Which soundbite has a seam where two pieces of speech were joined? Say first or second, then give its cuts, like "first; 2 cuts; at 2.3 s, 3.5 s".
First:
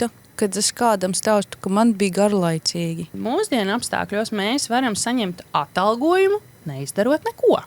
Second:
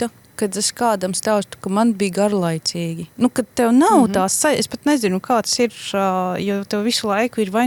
first; 1 cut; at 3.1 s